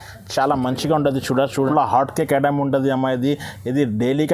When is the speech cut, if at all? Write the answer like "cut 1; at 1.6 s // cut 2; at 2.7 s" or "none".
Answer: cut 1; at 1.7 s